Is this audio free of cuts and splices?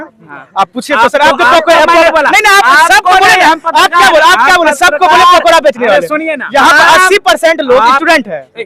yes; 0 cuts

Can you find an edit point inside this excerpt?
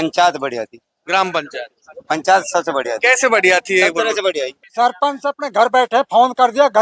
yes; 1 cut; at 4.6 s

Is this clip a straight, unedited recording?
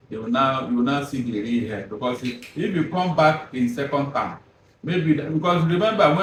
yes; 0 cuts

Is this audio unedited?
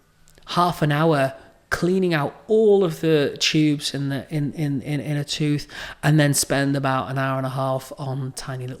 yes; 0 cuts

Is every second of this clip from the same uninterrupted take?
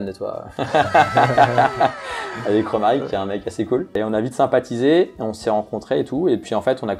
yes; 0 cuts

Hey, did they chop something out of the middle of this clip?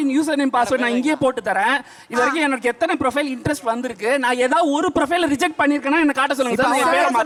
no; 0 cuts

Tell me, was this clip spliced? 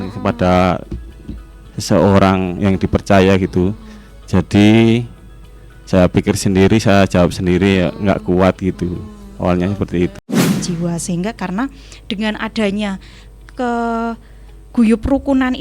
yes; 1 cut; at 10.5 s

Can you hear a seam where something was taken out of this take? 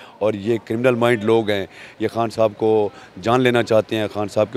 no; 0 cuts

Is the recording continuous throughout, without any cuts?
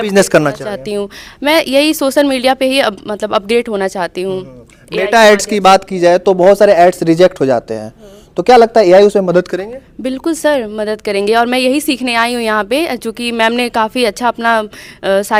yes; 0 cuts

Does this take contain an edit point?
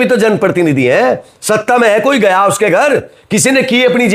no; 0 cuts

